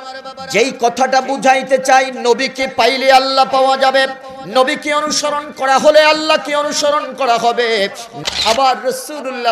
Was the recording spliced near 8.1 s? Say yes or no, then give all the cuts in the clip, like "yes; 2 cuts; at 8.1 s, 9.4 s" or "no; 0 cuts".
yes; 1 cut; at 8.1 s